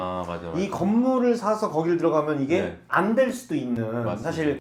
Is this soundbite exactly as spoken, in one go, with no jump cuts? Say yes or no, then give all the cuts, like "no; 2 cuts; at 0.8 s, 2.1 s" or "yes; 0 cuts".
yes; 0 cuts